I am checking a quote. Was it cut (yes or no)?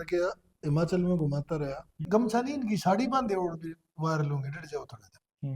yes